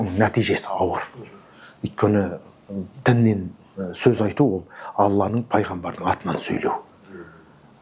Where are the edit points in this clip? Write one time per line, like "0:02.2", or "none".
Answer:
none